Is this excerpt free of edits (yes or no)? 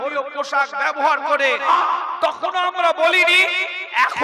no